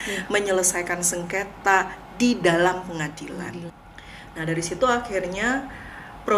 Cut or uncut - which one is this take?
cut